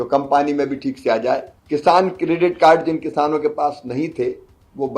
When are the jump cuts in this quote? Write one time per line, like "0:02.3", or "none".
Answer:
0:01.5